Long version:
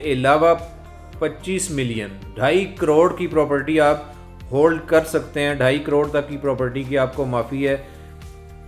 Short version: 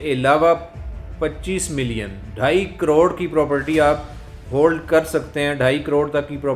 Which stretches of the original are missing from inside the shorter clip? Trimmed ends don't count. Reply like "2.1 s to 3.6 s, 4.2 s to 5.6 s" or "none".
none